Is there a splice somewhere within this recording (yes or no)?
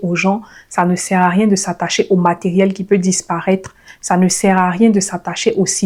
no